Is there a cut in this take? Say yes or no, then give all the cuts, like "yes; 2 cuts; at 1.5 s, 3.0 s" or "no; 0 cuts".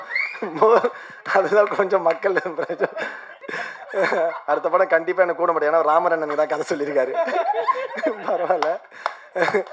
yes; 1 cut; at 3.3 s